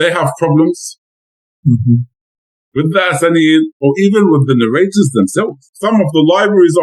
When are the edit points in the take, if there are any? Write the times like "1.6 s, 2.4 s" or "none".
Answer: 5.7 s